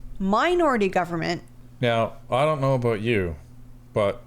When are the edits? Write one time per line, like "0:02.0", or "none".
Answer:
0:01.5